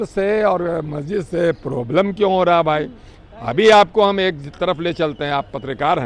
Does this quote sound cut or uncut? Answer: uncut